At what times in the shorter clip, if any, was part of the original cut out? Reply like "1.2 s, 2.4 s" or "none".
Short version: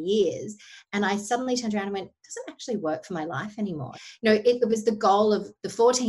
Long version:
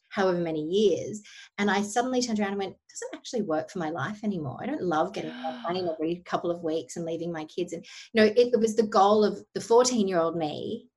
3.9 s